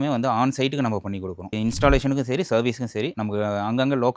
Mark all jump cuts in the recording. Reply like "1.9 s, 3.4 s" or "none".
1.5 s